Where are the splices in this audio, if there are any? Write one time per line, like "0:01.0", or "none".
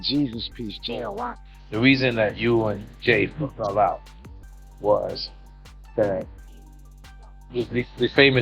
0:01.6